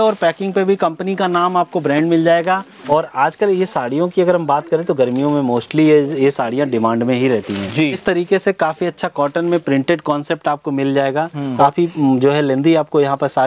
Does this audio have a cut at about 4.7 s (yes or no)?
no